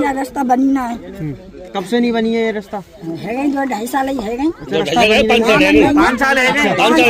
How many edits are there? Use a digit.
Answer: 0